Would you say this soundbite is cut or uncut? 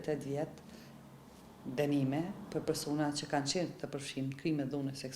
uncut